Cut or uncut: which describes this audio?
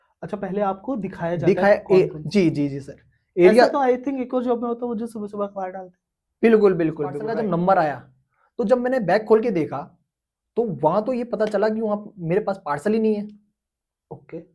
cut